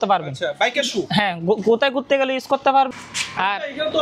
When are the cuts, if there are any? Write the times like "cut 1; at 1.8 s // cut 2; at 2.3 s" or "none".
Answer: cut 1; at 2.9 s

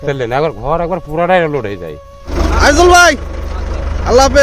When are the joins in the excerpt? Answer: cut 1; at 2.3 s

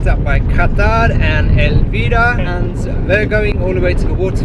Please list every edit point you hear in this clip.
cut 1; at 2.5 s

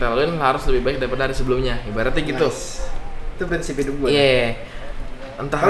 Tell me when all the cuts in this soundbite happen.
none

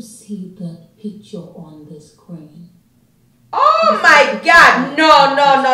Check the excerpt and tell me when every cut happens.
none

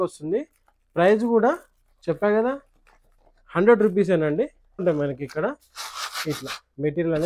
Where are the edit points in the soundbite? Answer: cut 1; at 4.8 s

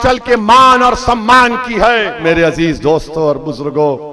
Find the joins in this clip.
cut 1; at 2.2 s

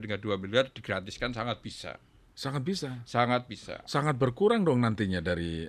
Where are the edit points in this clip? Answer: none

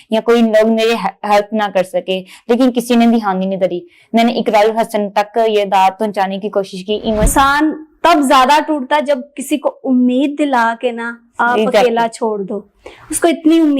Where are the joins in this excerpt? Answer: cut 1; at 7.3 s

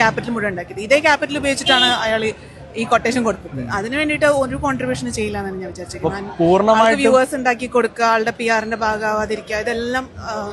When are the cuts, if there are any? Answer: cut 1; at 6.7 s

